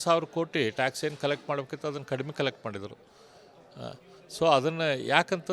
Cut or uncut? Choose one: cut